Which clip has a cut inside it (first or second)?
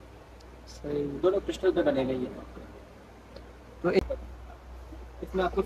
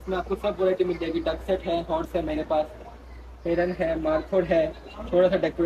first